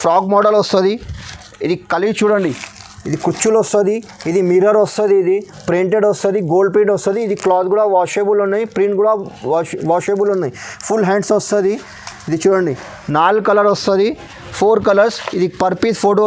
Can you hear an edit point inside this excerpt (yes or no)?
no